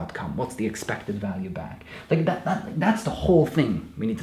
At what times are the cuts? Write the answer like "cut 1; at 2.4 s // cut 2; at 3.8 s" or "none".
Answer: none